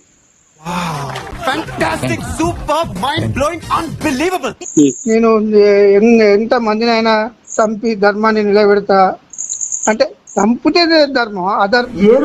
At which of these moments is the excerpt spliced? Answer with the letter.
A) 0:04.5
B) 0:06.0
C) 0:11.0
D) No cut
A